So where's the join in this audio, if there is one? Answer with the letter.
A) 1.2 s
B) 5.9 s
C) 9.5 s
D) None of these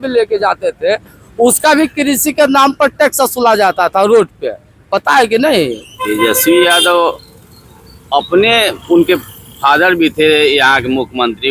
B